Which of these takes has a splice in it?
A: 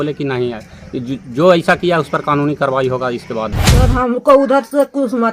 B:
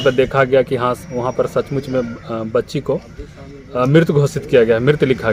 A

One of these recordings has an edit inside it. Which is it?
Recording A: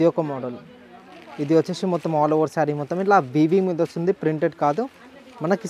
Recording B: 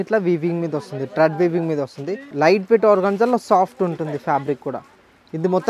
B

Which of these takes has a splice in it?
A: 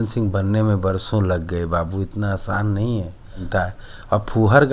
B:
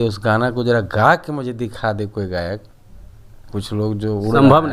A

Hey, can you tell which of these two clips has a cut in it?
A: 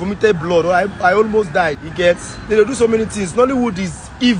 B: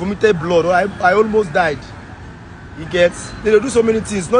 A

